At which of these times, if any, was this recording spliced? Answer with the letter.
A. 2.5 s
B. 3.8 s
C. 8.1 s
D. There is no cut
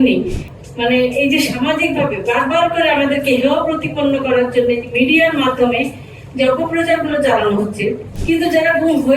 C